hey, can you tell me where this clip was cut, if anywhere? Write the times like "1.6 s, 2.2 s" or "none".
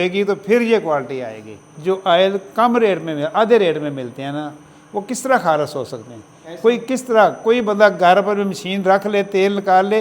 1.7 s